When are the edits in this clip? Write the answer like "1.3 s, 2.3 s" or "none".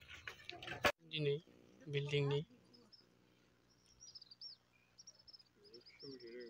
1.1 s